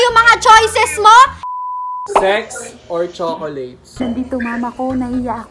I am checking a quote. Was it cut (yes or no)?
yes